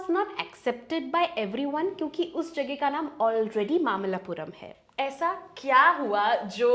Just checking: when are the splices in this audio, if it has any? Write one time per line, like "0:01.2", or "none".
0:04.7